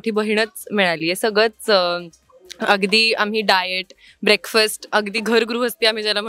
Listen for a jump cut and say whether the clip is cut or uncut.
uncut